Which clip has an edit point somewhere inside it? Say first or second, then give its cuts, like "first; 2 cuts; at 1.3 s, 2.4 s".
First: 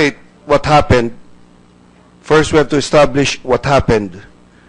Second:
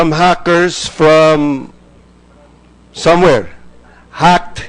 first; 1 cut; at 1.2 s